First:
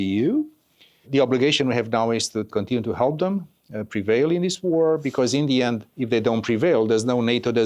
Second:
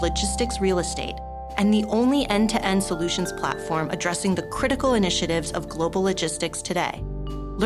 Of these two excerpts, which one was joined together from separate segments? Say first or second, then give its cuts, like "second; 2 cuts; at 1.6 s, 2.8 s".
first; 2 cuts; at 1.0 s, 2.5 s